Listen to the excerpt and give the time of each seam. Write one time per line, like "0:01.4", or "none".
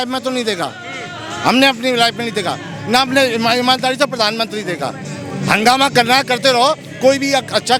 none

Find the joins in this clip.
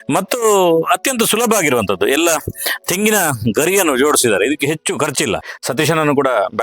0:05.6

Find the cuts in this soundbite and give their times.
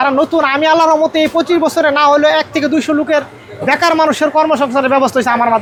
none

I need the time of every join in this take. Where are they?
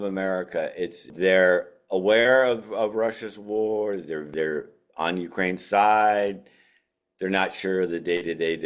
0:01.1
0:04.3

